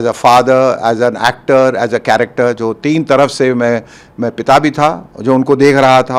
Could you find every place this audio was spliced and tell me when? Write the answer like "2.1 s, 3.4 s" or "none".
none